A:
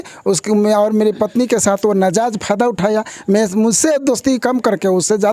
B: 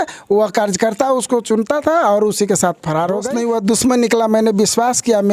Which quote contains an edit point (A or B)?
B